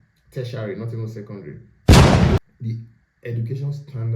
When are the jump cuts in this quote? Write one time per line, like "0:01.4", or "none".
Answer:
0:01.6
0:02.4